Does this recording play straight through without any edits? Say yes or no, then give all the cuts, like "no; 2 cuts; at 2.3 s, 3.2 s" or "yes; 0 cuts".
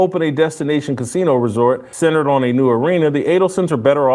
no; 1 cut; at 1.9 s